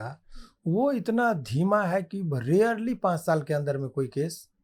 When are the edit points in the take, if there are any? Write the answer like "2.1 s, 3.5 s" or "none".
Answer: none

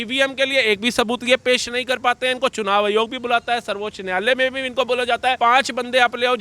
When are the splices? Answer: 5.4 s

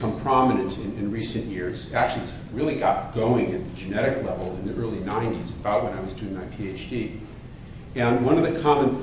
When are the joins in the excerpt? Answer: 7.6 s

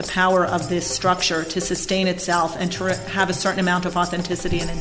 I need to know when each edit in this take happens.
none

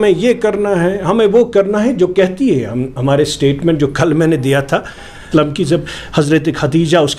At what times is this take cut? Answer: 5.3 s

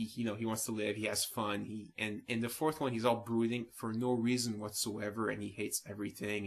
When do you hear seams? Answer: none

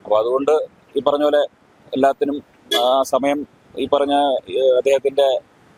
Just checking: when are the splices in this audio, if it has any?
none

